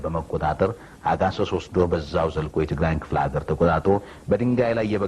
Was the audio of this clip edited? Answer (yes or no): no